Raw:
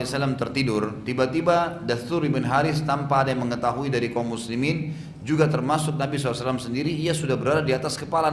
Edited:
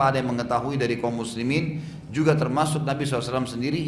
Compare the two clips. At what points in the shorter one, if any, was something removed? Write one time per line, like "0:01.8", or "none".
none